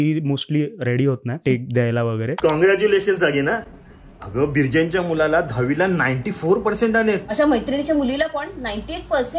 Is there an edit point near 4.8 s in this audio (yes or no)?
no